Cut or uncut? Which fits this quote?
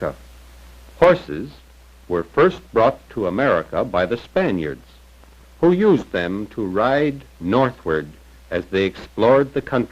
cut